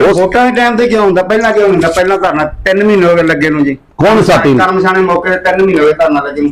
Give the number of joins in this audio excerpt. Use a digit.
0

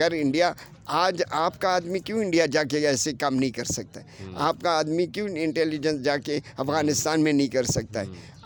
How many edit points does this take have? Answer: 0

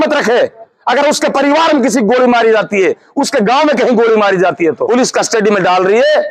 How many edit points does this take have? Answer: 1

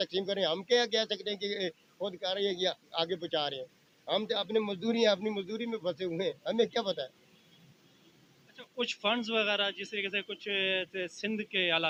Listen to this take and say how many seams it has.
0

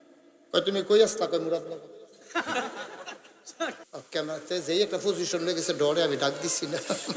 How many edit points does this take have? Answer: 1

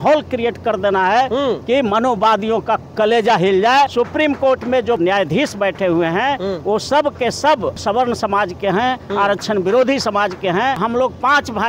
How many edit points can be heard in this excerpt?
4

